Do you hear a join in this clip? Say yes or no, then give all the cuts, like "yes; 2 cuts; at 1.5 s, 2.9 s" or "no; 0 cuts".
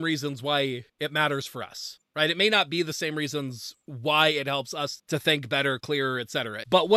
no; 0 cuts